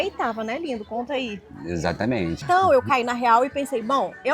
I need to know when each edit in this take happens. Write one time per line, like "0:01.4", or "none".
0:02.4